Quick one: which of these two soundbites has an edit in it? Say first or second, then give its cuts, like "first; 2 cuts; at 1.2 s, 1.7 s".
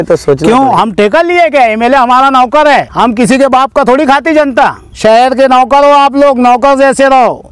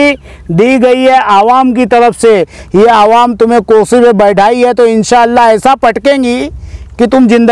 first; 2 cuts; at 2.9 s, 4.9 s